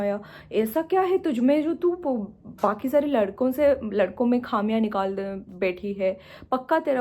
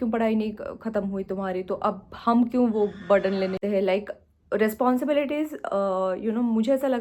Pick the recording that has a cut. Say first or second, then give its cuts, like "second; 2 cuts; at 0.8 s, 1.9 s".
second; 1 cut; at 3.6 s